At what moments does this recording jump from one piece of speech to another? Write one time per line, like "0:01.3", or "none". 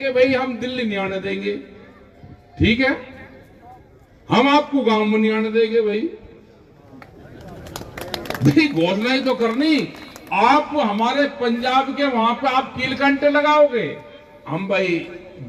none